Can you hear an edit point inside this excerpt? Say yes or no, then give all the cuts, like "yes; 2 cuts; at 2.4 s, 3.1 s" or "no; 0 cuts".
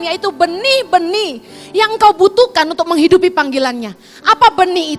no; 0 cuts